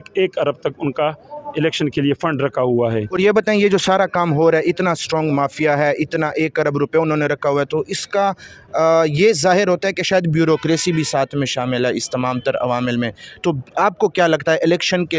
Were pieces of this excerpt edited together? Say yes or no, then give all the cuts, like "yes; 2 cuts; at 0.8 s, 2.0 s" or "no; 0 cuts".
no; 0 cuts